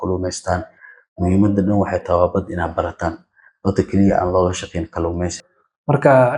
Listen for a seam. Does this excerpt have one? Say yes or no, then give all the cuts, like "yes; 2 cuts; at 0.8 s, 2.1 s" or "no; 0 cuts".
yes; 1 cut; at 5.4 s